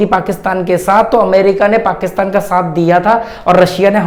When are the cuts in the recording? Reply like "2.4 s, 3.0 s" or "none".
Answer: none

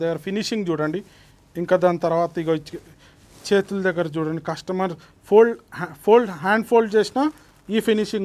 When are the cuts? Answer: none

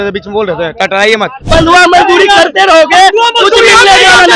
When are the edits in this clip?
1.5 s

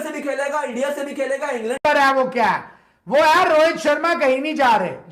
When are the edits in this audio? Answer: 1.8 s

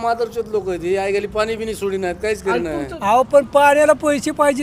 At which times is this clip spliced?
2.9 s

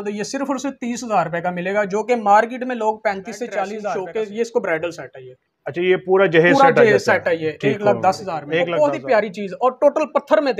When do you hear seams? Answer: 3.9 s, 8.5 s

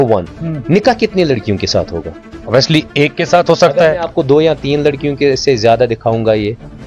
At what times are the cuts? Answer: none

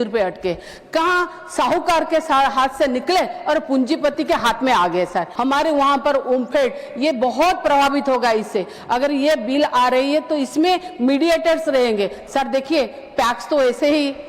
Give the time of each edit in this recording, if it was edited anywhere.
5.3 s

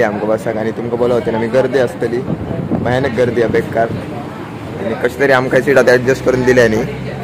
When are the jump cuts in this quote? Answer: none

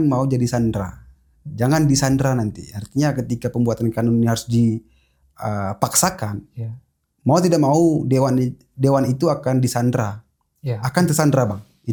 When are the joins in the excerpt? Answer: none

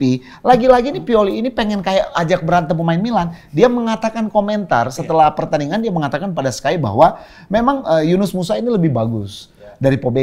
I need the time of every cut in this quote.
none

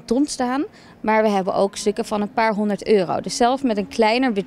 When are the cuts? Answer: none

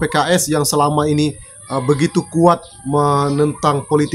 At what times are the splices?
none

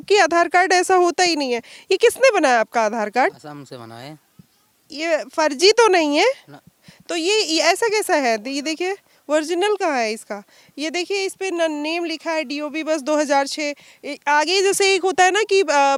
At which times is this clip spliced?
none

